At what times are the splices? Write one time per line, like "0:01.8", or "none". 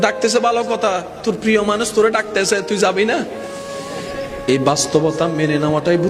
none